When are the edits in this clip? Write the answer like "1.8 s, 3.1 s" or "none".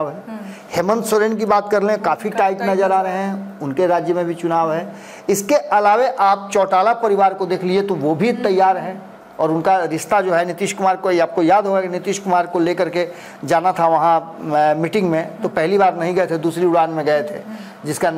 none